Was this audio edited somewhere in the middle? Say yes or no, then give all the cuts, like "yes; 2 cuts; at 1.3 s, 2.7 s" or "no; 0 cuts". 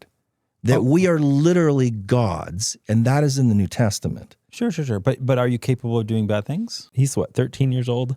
yes; 1 cut; at 6.9 s